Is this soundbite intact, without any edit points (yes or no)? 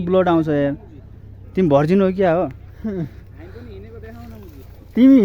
yes